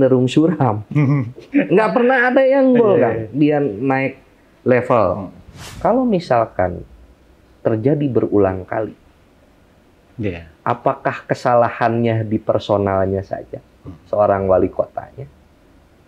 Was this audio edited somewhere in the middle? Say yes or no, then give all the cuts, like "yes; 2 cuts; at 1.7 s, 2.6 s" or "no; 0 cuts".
yes; 1 cut; at 5.7 s